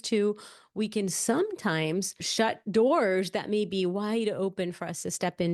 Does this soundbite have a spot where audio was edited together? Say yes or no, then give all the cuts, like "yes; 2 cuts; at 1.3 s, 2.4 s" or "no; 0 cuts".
yes; 1 cut; at 2.3 s